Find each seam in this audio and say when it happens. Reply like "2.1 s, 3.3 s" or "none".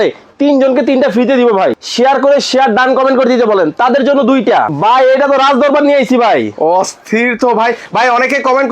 1.8 s, 4.7 s